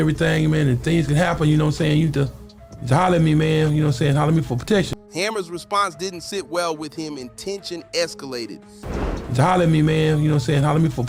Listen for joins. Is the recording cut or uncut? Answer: uncut